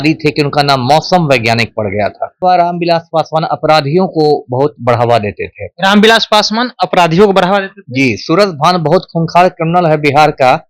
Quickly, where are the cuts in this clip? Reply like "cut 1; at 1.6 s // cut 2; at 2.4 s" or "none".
cut 1; at 2.4 s